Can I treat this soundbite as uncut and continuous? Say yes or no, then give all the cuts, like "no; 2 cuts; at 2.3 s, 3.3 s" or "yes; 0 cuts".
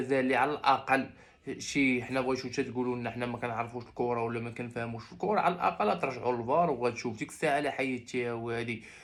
yes; 0 cuts